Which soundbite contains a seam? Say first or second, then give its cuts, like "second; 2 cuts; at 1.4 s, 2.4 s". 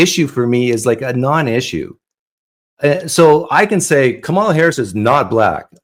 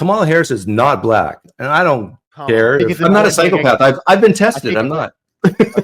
second; 1 cut; at 2.9 s